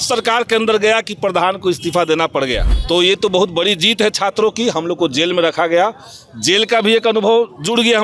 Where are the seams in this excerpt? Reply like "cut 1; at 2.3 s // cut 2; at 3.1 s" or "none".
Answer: cut 1; at 2.7 s